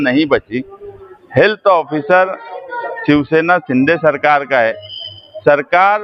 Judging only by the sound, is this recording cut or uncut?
uncut